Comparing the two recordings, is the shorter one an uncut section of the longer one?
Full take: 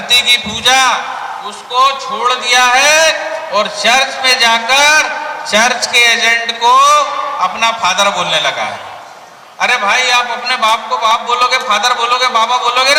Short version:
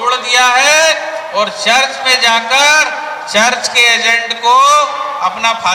yes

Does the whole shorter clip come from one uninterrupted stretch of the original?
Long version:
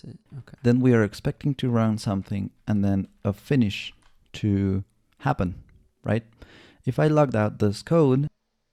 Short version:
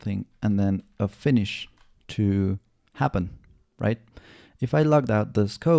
yes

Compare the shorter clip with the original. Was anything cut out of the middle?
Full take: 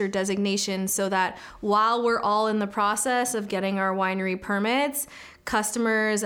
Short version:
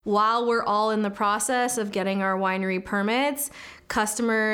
no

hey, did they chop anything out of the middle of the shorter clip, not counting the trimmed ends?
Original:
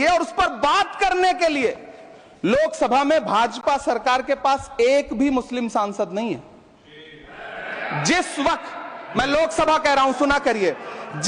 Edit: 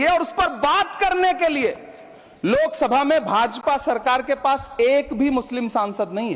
no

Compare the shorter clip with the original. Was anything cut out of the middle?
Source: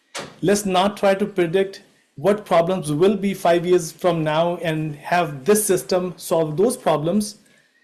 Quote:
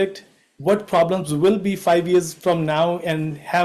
no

